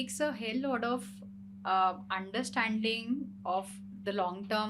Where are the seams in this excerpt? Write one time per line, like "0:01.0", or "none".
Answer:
none